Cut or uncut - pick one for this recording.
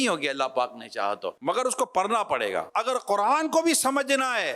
cut